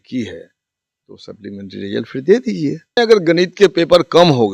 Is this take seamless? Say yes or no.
no